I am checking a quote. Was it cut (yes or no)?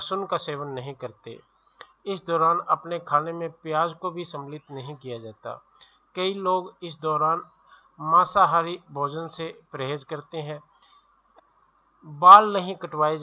no